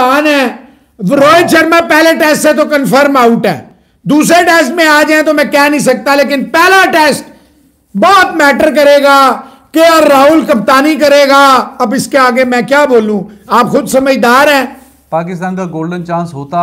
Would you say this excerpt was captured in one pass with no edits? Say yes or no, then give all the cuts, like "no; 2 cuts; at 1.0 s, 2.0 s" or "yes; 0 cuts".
yes; 0 cuts